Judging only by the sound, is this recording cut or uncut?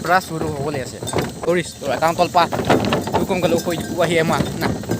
cut